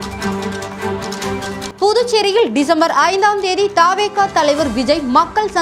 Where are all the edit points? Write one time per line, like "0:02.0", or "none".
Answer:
0:01.6